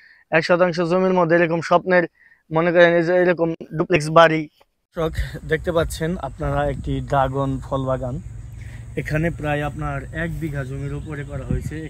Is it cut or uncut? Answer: cut